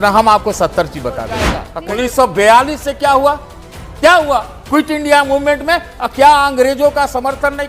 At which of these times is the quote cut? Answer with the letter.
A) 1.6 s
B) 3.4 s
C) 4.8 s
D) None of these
A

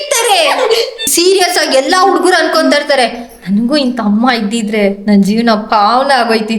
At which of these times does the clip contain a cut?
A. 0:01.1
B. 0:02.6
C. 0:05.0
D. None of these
A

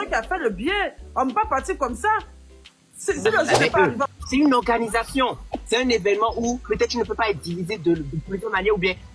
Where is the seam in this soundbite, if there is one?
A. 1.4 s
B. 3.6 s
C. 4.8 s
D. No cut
B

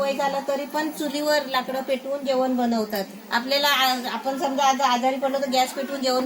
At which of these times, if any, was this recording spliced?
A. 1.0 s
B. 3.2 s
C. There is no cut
B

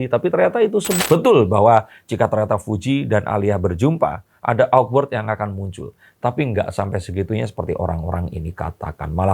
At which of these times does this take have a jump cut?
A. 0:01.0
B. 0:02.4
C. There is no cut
A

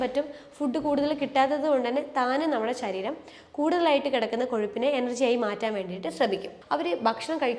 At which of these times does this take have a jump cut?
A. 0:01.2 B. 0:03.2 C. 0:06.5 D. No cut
C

